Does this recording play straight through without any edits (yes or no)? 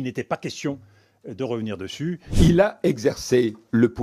no